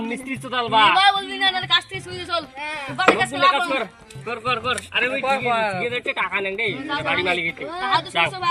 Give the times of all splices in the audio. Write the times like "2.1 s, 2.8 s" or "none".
none